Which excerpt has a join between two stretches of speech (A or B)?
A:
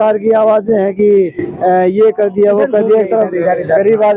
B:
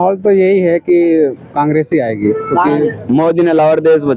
B